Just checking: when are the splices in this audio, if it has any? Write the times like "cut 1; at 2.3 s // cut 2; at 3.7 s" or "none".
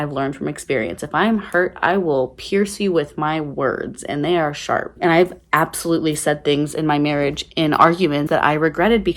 cut 1; at 8.2 s